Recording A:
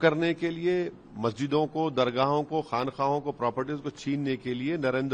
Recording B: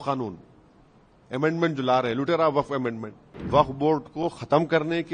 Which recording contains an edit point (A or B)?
B